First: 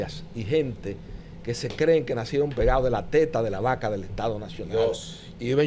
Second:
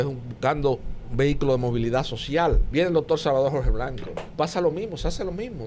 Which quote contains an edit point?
second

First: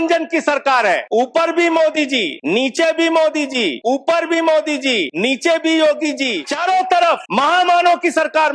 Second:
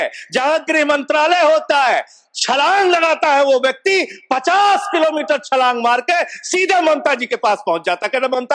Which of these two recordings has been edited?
first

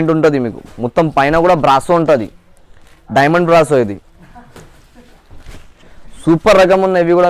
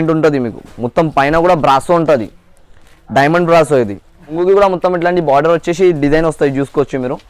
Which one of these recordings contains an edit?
second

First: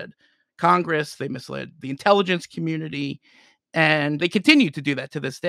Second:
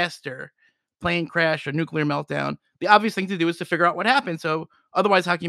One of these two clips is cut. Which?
first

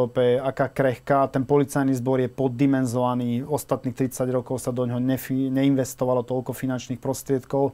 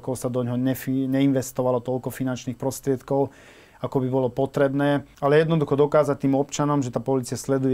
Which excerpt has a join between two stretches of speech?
second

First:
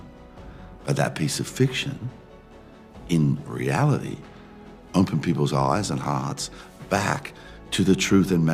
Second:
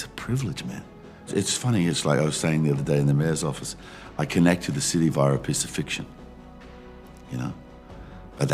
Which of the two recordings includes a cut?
second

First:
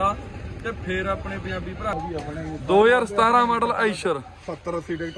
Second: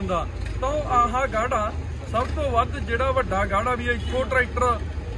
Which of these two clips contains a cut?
first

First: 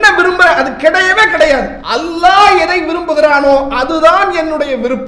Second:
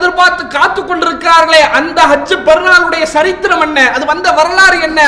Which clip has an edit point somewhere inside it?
first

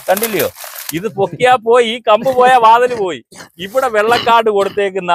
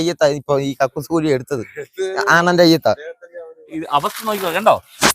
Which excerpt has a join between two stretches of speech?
second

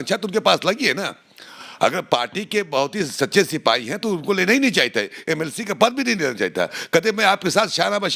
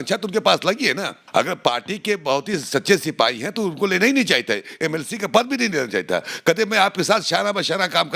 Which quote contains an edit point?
second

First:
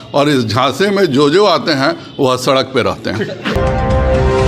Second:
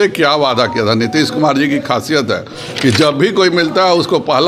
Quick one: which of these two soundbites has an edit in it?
first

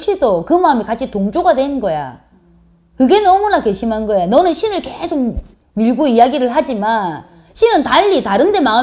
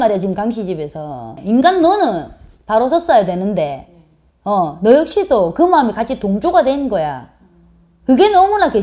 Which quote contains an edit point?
second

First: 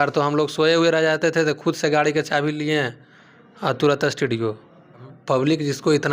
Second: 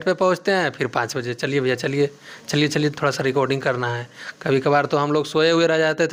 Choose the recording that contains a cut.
first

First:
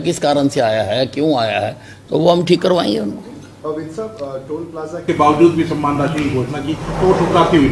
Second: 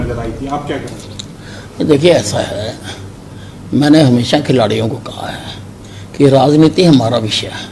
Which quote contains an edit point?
first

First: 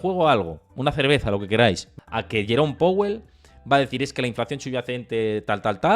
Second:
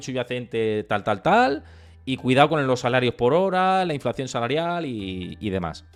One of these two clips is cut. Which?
first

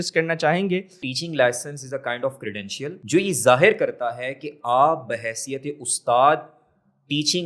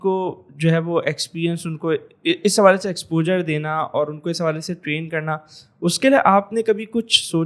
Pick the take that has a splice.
first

